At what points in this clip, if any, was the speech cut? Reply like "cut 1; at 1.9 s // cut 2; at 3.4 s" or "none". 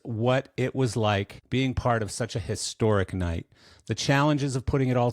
cut 1; at 1.4 s